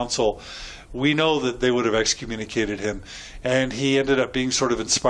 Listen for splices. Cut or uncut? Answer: uncut